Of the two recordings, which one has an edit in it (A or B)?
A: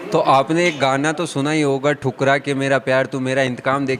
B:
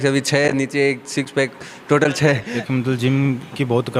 B